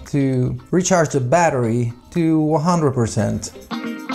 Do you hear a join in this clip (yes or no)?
no